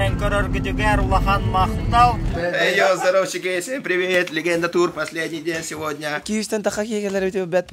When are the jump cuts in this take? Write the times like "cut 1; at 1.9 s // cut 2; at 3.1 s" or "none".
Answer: cut 1; at 2.3 s // cut 2; at 6.2 s